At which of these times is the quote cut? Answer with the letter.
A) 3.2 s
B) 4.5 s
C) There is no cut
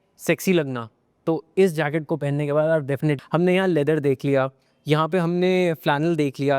A